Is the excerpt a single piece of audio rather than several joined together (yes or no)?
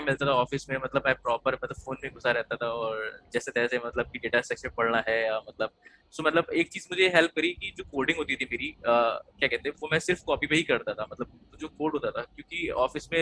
yes